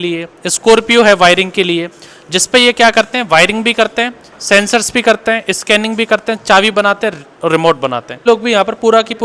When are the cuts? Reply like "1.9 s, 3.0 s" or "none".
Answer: 8.2 s